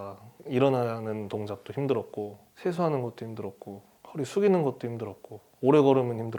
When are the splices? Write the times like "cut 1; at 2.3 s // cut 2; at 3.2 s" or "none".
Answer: none